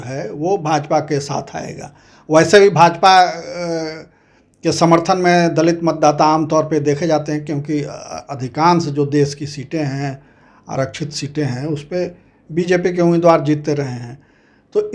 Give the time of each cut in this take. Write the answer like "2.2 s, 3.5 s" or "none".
none